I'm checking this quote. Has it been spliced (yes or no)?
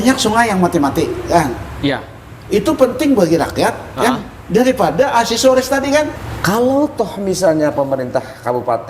yes